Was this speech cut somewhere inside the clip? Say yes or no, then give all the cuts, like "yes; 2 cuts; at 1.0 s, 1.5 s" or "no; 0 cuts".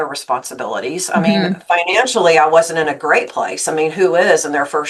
no; 0 cuts